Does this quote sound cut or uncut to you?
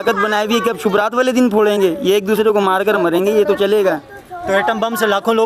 uncut